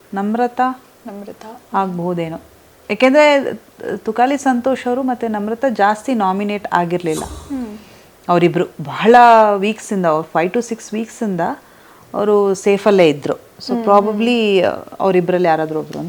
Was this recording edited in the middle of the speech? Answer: no; 0 cuts

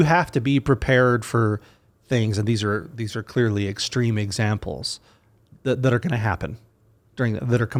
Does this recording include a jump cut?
no; 0 cuts

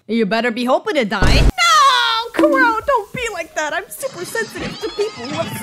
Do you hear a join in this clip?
yes; 1 cut; at 1.5 s

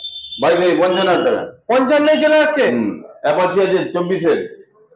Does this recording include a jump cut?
no; 0 cuts

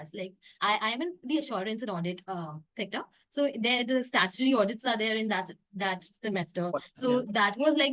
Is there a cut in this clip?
no; 0 cuts

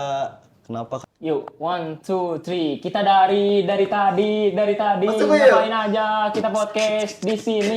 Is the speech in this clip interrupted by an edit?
yes; 1 cut; at 1.0 s

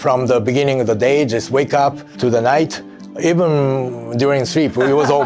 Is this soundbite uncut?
no; 1 cut; at 2.1 s

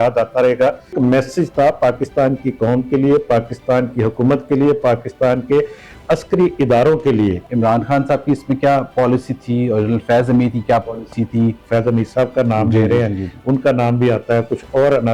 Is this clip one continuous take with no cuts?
no; 3 cuts; at 0.9 s, 7.5 s, 11.6 s

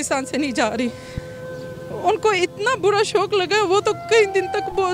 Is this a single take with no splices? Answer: no; 1 cut; at 1.5 s

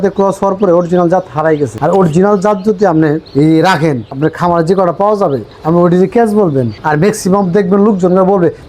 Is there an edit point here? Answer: yes; 1 cut; at 6.8 s

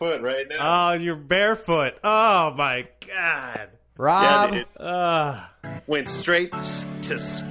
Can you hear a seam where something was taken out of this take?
no; 0 cuts

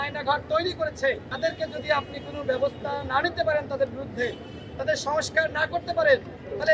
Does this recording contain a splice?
no; 0 cuts

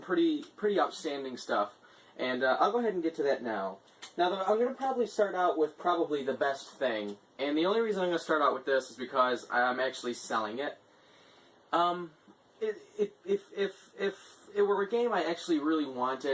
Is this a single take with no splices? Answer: no; 1 cut; at 1.6 s

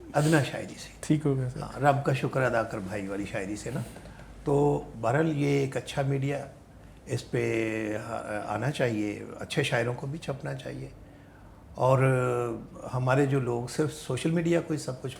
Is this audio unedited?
yes; 0 cuts

